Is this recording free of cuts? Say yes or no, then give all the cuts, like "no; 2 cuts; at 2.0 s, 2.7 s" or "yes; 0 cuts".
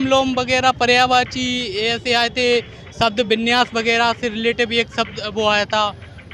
yes; 0 cuts